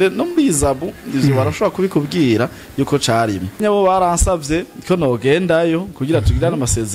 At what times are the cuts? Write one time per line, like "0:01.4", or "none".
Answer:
0:03.6